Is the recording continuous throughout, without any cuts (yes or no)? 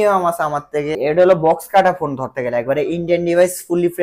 no